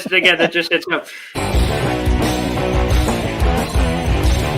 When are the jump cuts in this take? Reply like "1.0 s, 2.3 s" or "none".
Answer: 2.5 s

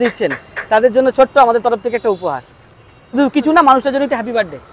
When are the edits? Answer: 3.1 s

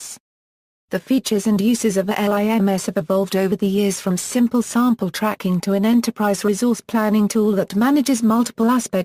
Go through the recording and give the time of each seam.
2.2 s

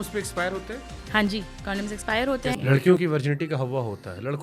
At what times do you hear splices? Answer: 2.6 s

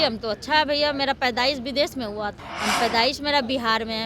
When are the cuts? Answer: 2.4 s

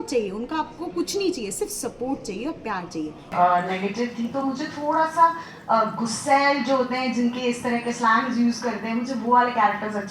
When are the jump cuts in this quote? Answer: 3.3 s

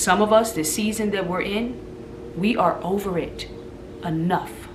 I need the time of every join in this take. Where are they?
none

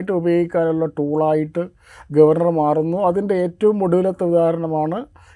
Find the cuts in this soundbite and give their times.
none

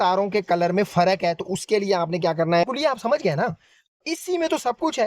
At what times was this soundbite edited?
2.6 s

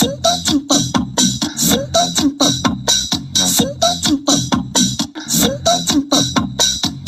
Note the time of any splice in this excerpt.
none

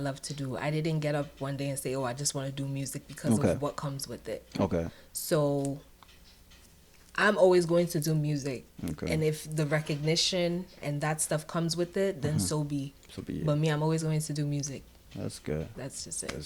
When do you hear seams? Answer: none

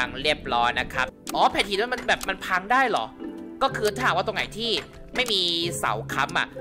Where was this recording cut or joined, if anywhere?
1.1 s

